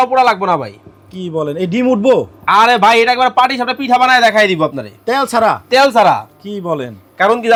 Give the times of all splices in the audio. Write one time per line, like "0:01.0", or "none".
none